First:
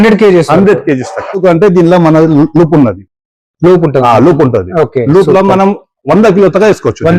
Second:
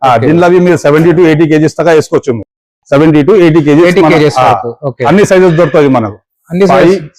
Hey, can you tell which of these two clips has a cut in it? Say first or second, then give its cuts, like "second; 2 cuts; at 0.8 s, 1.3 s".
first; 1 cut; at 1.4 s